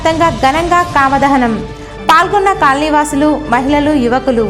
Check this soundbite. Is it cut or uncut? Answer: uncut